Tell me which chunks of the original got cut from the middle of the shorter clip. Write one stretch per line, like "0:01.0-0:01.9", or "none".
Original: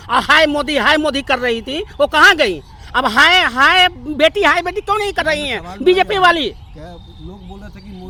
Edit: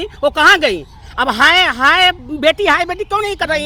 none